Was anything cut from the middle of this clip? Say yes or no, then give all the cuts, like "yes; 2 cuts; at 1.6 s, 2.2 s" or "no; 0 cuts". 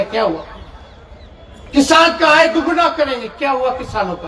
no; 0 cuts